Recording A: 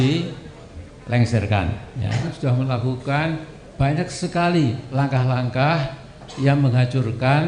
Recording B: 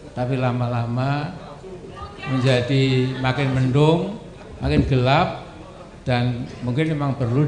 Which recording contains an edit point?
A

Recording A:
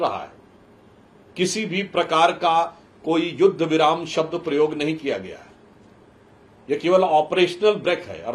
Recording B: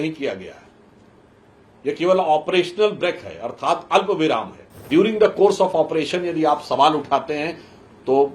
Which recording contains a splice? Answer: B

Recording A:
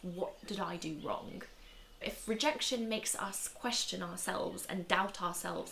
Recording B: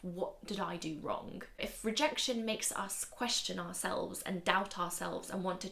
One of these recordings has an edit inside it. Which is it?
B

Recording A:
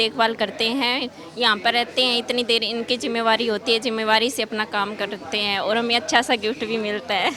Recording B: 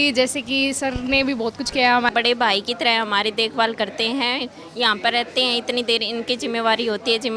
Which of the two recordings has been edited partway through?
B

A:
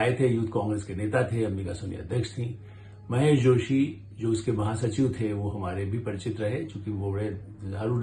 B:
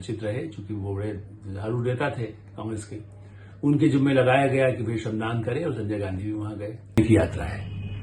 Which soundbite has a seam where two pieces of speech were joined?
B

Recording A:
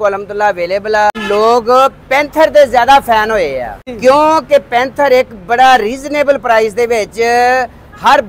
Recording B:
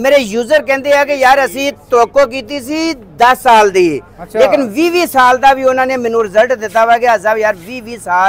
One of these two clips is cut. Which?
A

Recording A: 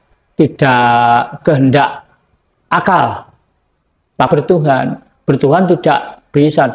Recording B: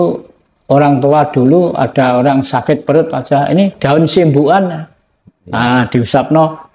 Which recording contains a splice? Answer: A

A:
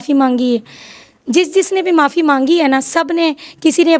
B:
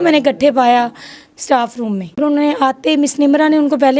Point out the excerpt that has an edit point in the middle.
B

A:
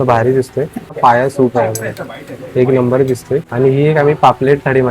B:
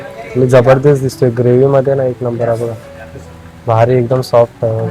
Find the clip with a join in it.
A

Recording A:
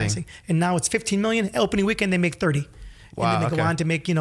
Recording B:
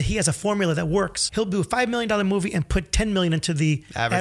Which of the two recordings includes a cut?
B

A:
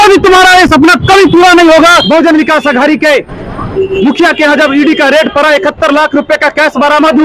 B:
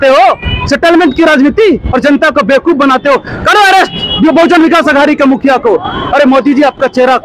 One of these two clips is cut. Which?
A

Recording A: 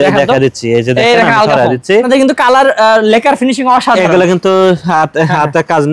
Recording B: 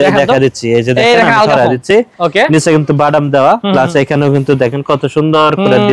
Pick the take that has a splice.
A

